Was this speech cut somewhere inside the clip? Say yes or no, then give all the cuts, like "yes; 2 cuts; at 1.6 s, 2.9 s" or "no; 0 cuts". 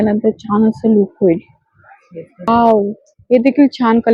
yes; 1 cut; at 2.5 s